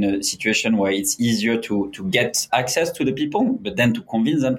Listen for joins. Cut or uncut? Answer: uncut